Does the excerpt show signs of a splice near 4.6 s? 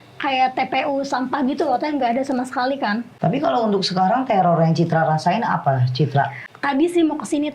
no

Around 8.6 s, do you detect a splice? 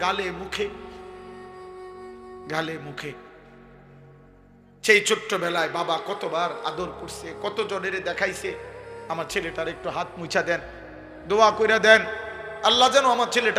no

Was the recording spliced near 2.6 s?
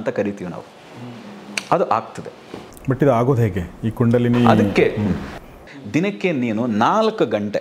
yes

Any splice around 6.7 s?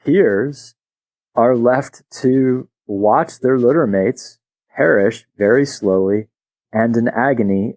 yes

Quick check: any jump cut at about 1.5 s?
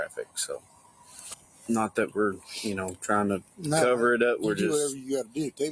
yes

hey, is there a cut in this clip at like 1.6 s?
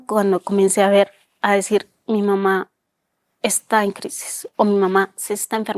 no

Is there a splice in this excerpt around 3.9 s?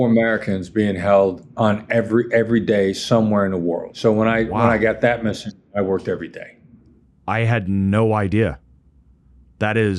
yes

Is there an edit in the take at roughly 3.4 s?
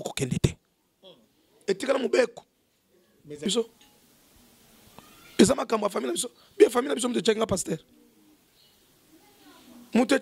yes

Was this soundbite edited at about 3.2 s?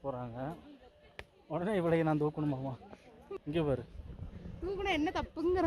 yes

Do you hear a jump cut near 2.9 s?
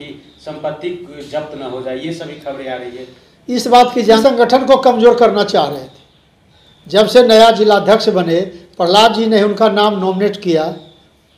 no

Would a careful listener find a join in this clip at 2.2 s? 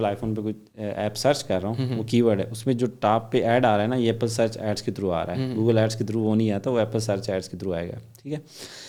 no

